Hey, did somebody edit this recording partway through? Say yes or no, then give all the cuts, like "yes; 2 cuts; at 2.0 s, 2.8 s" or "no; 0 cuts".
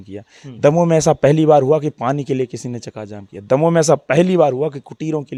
no; 0 cuts